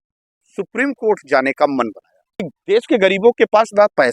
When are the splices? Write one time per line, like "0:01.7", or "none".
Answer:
0:02.5